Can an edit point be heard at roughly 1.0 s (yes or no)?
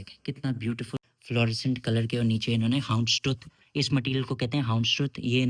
yes